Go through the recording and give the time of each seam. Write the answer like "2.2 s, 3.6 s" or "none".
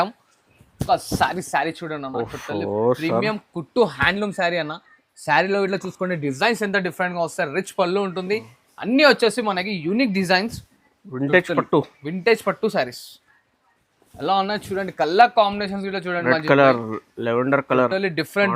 none